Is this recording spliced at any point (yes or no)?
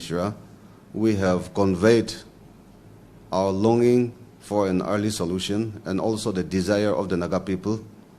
no